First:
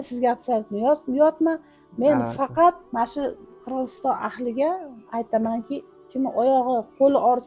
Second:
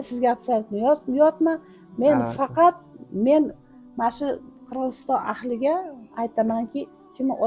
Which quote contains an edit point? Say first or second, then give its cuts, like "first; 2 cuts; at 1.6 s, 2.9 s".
first; 1 cut; at 2.8 s